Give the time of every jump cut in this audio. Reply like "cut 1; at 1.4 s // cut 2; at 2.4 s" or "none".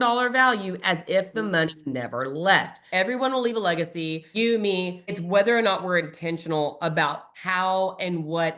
cut 1; at 2.8 s // cut 2; at 4.2 s // cut 3; at 5.1 s // cut 4; at 7.3 s